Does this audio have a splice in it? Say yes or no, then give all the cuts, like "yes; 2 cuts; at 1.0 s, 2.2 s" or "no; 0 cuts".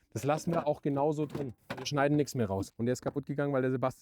yes; 2 cuts; at 1.5 s, 2.7 s